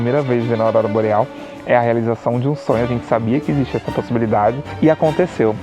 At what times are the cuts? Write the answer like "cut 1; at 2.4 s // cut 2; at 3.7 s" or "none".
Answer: cut 1; at 4.7 s